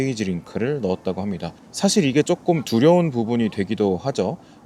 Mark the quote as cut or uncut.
uncut